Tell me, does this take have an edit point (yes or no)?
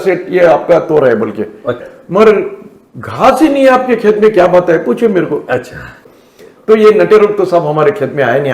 yes